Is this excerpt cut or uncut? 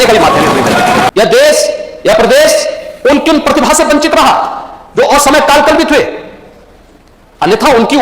cut